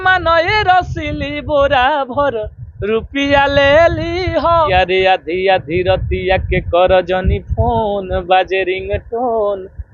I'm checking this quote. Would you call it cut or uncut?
cut